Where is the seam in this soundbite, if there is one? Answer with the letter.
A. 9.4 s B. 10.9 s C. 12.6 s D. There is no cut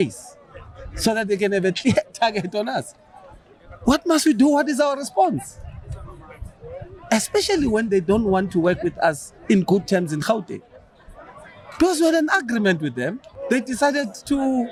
D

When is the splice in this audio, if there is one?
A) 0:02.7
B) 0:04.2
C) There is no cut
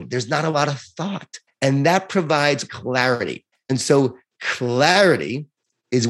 A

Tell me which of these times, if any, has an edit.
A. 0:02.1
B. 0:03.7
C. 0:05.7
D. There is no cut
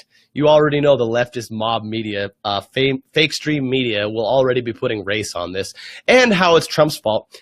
A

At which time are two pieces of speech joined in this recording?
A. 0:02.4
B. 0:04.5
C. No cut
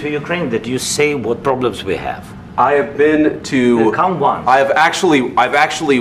C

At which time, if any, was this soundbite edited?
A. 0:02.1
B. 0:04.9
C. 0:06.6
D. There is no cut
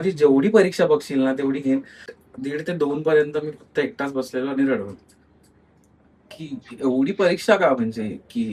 A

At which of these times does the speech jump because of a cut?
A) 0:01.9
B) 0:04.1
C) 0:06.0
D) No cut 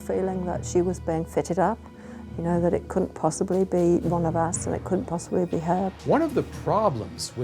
C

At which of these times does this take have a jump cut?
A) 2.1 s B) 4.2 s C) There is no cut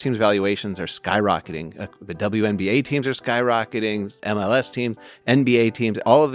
B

